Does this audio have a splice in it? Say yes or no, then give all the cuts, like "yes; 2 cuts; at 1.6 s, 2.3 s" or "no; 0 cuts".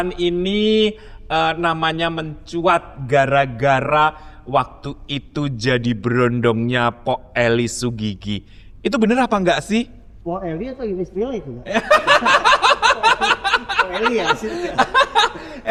no; 0 cuts